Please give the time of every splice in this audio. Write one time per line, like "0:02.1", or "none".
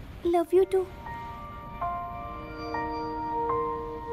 0:01.0
0:02.6